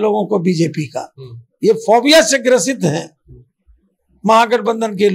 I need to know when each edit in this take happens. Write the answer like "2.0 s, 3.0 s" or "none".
none